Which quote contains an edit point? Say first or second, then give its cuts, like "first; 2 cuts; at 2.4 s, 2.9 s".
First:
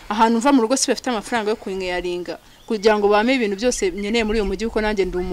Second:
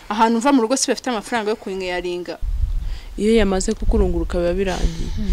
second; 1 cut; at 2.5 s